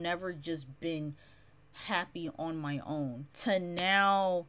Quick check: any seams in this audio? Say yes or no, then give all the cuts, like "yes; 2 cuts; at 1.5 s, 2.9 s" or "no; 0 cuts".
yes; 1 cut; at 3.2 s